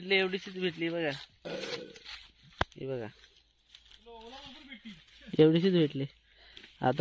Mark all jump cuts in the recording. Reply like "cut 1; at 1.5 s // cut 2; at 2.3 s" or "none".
none